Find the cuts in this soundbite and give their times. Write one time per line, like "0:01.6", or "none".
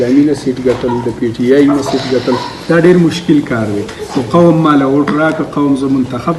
none

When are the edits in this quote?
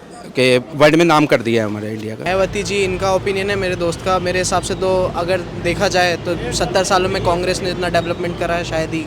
0:02.2

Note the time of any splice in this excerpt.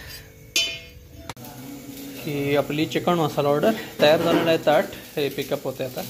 0:01.3

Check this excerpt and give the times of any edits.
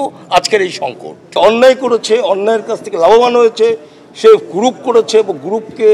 0:01.2

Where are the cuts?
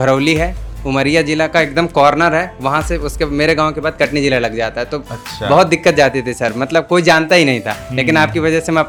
none

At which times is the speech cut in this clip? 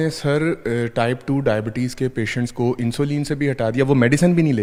none

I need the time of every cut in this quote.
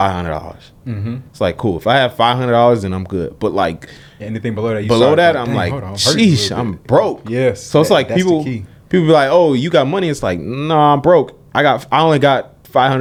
none

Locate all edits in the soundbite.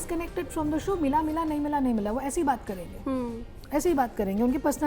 none

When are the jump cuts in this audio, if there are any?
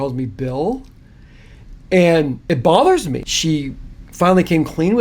0:02.4
0:03.2

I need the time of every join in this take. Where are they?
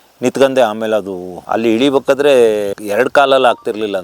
0:01.4

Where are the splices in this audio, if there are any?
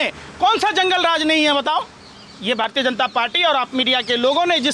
none

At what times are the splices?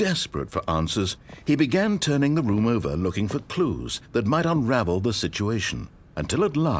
0:02.5

